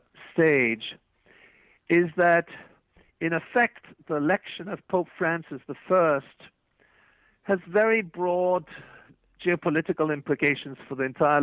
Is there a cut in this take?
no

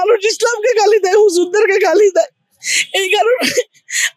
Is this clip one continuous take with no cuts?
yes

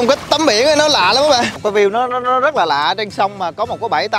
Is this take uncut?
no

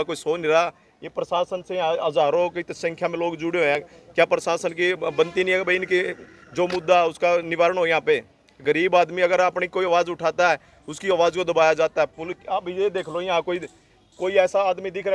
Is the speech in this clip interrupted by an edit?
no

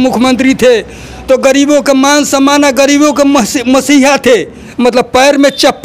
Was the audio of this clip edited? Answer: yes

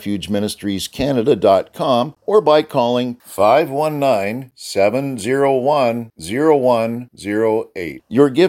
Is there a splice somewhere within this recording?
yes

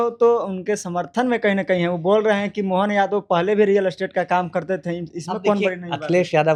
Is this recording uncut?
yes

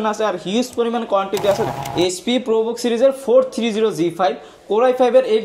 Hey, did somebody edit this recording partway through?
yes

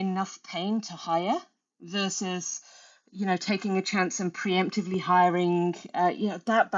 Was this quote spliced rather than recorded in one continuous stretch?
no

